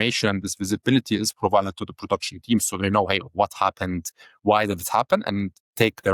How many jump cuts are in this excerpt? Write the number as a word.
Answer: zero